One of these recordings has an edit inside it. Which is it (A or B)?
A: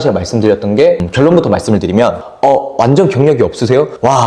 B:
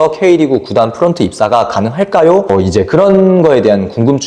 A